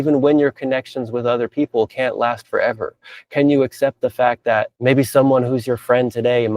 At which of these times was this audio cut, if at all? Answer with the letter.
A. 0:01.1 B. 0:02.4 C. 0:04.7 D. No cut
C